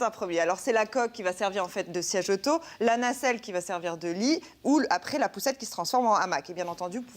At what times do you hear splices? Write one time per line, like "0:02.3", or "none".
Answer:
0:05.9